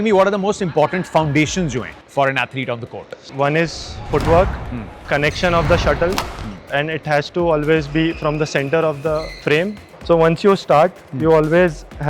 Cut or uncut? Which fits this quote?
cut